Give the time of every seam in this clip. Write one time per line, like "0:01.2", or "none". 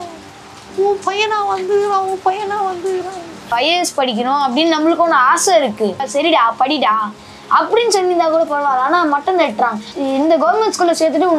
0:03.5